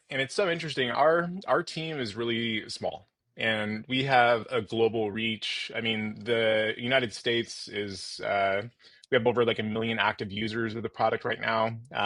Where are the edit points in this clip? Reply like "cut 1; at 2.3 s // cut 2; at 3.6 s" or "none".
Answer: none